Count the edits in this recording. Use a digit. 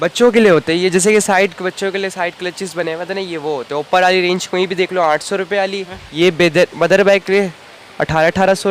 1